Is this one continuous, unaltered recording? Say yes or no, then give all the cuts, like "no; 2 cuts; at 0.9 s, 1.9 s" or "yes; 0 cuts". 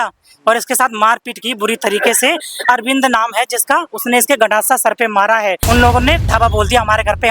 no; 1 cut; at 5.6 s